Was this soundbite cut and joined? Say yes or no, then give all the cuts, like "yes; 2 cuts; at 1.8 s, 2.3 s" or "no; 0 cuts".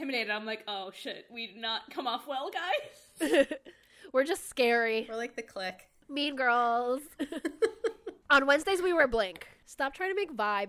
yes; 2 cuts; at 5.6 s, 9.6 s